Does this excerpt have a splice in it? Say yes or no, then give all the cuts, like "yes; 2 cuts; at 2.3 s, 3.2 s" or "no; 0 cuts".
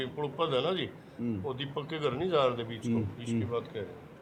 no; 0 cuts